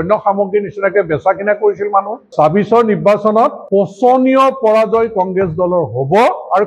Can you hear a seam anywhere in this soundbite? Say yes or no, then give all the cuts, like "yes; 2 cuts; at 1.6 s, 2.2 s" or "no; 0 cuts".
yes; 2 cuts; at 2.3 s, 3.6 s